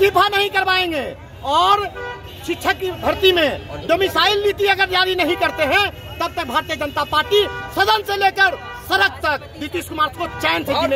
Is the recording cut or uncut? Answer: uncut